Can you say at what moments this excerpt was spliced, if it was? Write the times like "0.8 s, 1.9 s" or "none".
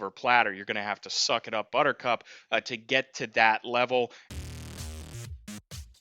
4.2 s

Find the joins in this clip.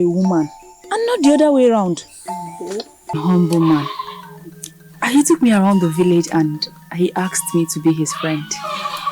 3.2 s

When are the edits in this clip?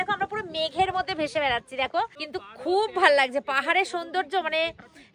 2.3 s

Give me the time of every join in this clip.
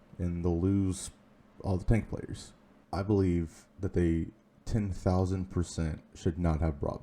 2.7 s

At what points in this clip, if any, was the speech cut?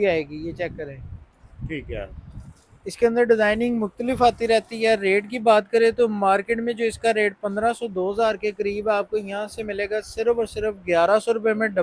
none

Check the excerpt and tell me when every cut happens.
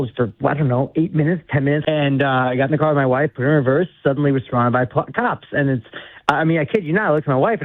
1.8 s

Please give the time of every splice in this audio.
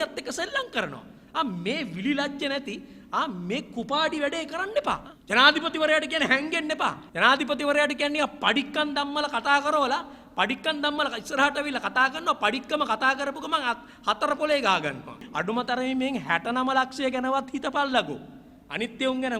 5.1 s, 7.1 s, 15.2 s

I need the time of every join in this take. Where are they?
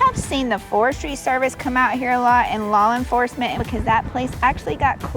3.6 s

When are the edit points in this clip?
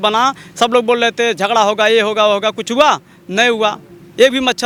none

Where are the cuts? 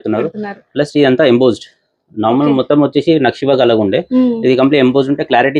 none

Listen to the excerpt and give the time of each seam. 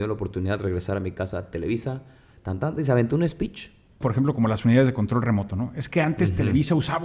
4.0 s

